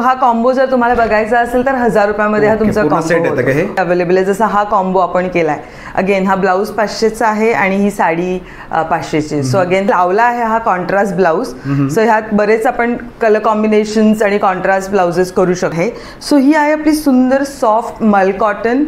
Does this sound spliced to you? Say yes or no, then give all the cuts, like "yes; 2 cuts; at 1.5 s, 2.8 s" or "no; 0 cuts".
yes; 3 cuts; at 3.8 s, 9.9 s, 15.7 s